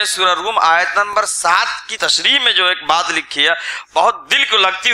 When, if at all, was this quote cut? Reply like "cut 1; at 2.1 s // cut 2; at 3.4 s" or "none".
cut 1; at 1.9 s